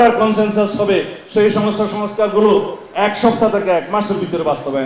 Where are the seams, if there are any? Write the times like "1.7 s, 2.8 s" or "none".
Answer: none